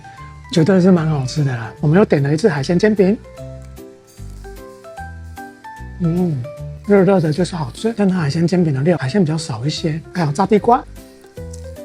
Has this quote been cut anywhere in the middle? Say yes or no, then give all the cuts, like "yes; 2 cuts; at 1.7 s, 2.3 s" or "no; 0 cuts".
no; 0 cuts